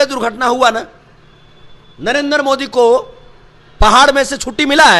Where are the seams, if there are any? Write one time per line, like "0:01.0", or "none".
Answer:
none